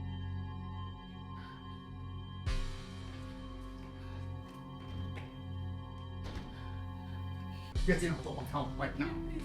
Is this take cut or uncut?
cut